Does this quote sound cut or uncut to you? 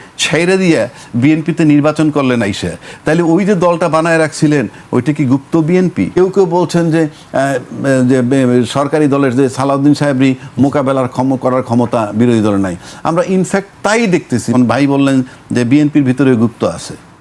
cut